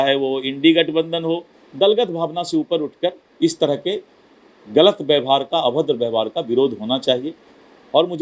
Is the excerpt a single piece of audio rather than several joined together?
no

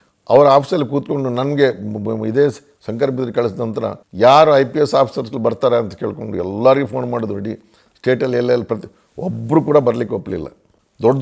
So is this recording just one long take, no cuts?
yes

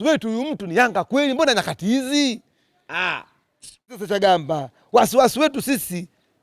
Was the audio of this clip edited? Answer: yes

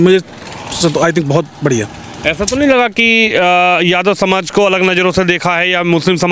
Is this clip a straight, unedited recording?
yes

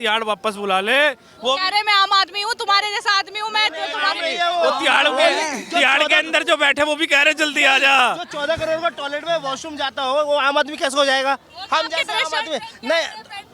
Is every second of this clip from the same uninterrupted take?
yes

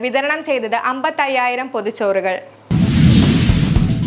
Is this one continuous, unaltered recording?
no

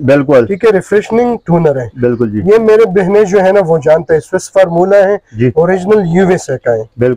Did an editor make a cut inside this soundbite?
no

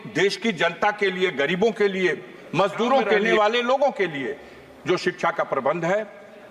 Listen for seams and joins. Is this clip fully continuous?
no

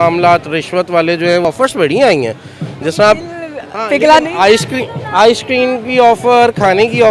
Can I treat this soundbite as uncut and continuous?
no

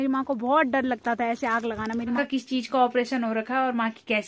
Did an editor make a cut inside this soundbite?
yes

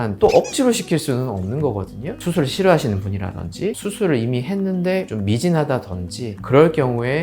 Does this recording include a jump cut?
yes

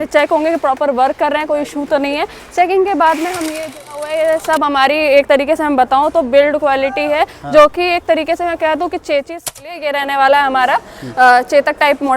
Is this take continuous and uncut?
no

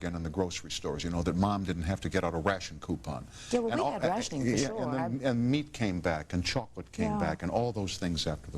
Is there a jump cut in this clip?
no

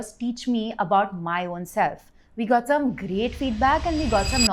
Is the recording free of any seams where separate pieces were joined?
yes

